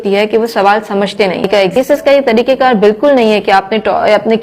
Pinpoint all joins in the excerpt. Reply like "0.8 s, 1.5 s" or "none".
1.8 s

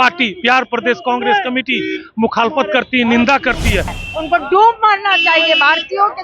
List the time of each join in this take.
4.0 s

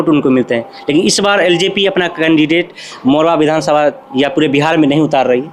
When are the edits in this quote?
none

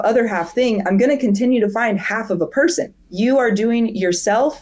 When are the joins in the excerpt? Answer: 3.0 s

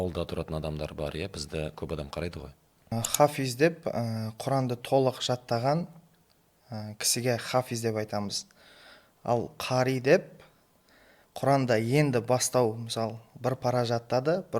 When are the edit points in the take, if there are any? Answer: 2.9 s

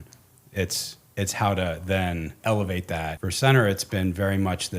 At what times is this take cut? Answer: 2.4 s, 3.2 s

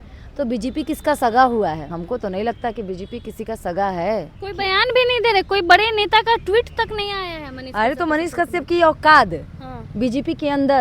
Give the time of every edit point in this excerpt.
1.9 s, 4.4 s

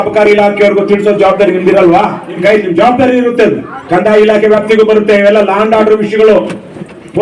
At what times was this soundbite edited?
2.3 s

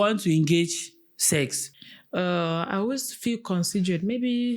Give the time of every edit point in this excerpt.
none

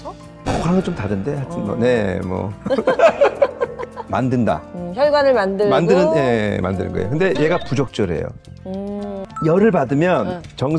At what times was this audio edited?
4.0 s, 9.2 s

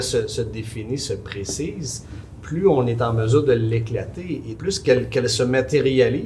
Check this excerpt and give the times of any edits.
4.5 s

